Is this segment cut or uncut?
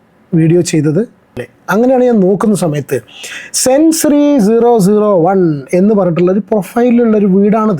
cut